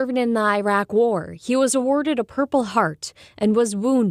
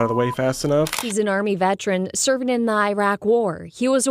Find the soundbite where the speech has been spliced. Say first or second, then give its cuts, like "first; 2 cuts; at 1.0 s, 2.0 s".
second; 1 cut; at 0.9 s